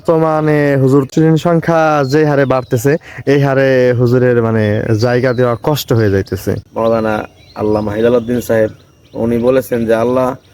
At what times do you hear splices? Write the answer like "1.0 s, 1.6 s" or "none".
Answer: 1.1 s, 6.7 s